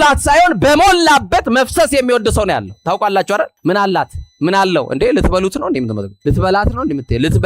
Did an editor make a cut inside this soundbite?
yes; 1 cut; at 6.1 s

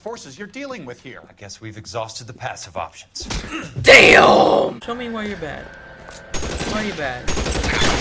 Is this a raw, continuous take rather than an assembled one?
no; 1 cut; at 4.8 s

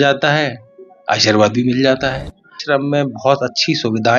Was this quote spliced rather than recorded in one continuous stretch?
yes; 1 cut; at 2.5 s

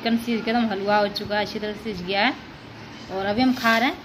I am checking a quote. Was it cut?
no; 0 cuts

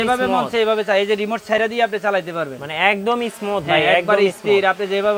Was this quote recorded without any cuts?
yes; 0 cuts

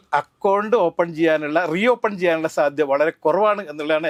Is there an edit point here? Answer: no; 0 cuts

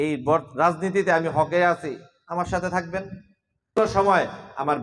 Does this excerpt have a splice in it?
yes; 1 cut; at 3.8 s

